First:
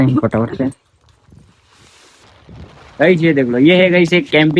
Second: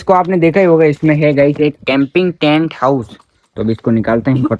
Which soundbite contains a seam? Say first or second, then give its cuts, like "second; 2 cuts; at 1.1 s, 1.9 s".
first; 1 cut; at 2.3 s